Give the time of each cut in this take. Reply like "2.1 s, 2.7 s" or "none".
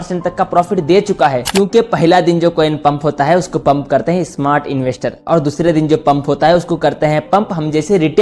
1.4 s